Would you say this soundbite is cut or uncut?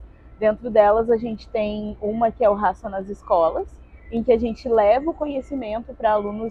uncut